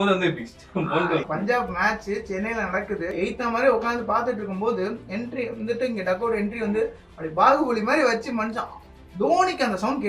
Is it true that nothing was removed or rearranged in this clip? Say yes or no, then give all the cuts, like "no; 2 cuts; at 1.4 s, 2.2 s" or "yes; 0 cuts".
no; 2 cuts; at 1.2 s, 3.1 s